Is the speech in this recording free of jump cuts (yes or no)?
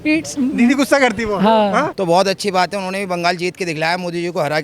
no